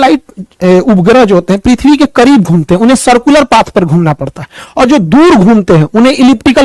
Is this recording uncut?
yes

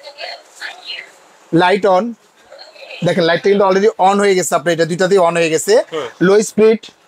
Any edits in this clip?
no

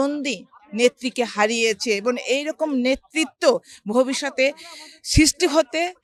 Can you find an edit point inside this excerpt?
no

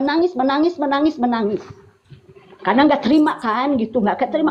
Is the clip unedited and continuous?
yes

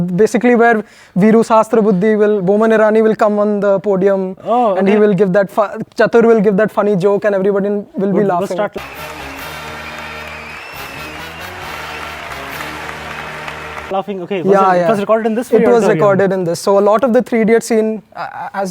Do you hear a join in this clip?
yes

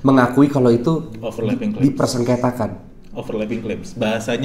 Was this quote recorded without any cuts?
yes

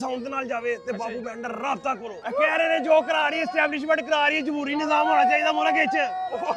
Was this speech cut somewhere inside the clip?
yes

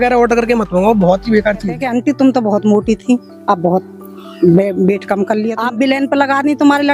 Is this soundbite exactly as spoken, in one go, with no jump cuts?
no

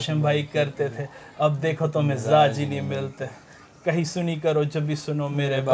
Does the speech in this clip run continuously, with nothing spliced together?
yes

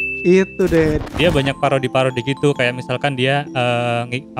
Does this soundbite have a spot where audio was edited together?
yes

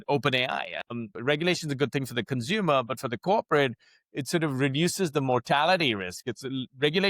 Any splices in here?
yes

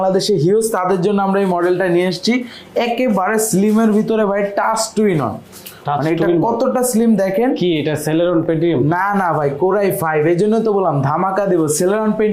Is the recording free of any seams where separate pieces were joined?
yes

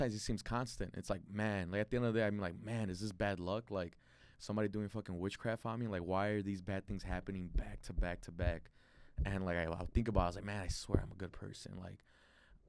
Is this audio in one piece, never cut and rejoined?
yes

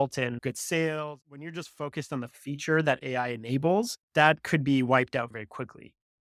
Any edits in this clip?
yes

